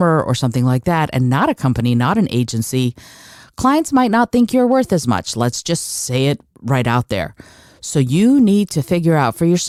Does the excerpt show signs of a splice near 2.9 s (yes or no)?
no